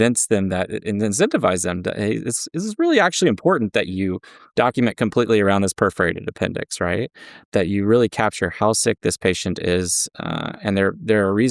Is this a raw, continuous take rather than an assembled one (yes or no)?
no